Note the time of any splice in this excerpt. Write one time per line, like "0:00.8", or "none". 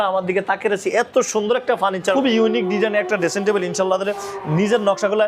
0:02.1